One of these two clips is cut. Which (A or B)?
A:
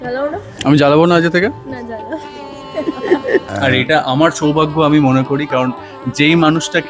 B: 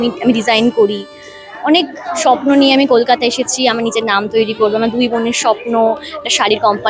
A